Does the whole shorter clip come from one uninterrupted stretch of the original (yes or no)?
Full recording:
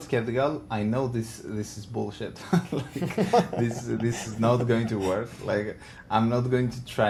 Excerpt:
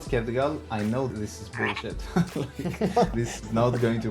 no